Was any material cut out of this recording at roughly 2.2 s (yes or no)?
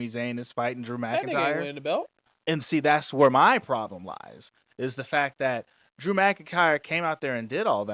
yes